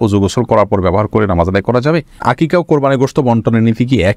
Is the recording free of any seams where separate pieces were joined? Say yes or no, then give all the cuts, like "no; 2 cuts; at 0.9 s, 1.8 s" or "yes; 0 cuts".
no; 1 cut; at 2.2 s